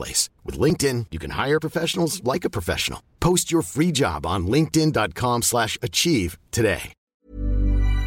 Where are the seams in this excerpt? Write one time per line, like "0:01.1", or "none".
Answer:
0:06.9